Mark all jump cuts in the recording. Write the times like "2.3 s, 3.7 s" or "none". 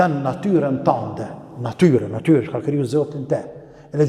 none